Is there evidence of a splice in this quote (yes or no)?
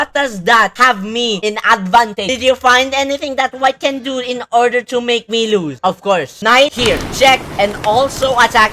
yes